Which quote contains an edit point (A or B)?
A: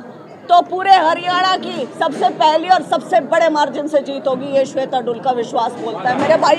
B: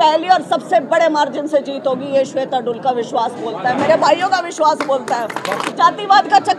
B